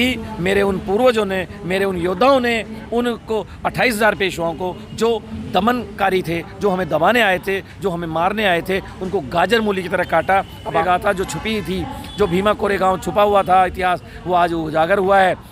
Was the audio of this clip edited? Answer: yes; 1 cut; at 10.8 s

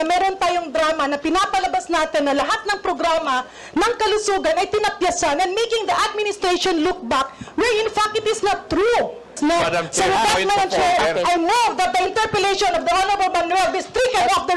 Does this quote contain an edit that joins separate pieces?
yes; 1 cut; at 9.4 s

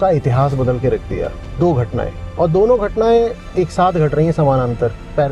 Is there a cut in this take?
no; 0 cuts

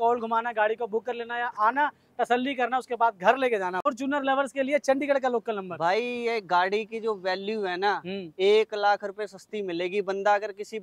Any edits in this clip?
yes; 1 cut; at 3.9 s

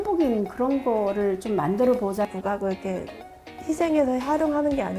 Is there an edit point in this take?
yes; 1 cut; at 2.3 s

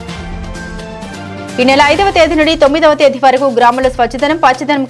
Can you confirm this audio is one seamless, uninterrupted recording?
no; 1 cut; at 1.2 s

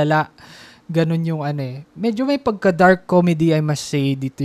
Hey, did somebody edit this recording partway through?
no; 0 cuts

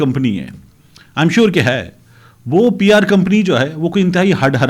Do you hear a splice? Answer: no; 0 cuts

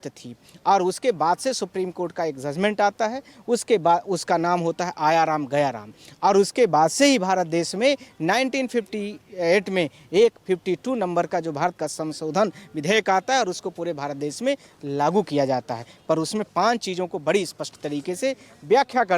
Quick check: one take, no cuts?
yes; 0 cuts

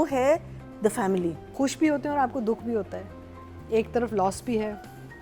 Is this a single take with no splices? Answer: no; 1 cut; at 1.4 s

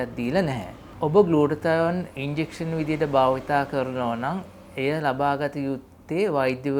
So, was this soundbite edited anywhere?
no; 0 cuts

